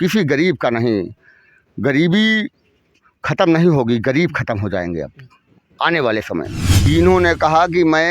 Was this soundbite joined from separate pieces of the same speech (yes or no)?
yes